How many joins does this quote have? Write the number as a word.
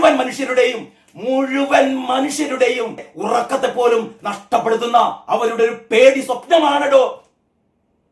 one